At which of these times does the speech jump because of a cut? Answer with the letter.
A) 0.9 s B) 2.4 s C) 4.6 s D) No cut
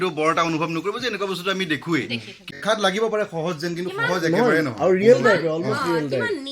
B